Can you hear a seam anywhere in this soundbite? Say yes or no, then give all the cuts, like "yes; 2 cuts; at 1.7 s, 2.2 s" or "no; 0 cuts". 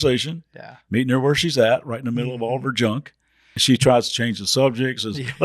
yes; 1 cut; at 3.6 s